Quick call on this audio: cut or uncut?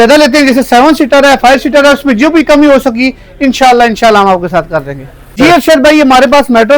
cut